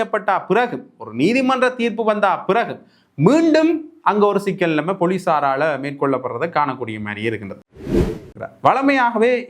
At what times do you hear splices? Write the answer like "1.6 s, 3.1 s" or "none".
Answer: 7.9 s